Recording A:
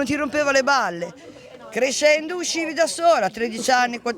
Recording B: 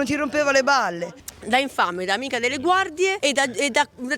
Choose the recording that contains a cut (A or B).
B